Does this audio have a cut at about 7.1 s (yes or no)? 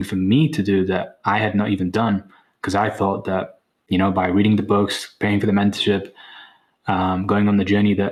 no